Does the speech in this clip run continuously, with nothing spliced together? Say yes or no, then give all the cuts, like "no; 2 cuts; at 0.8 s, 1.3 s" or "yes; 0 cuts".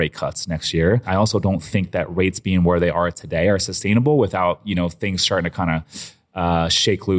yes; 0 cuts